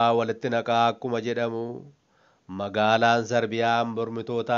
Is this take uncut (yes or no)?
yes